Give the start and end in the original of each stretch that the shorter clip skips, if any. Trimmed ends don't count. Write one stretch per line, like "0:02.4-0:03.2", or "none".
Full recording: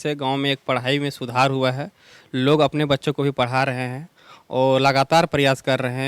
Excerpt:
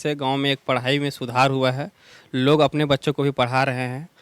none